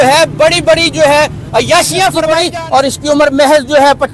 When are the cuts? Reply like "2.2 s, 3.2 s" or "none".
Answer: 2.4 s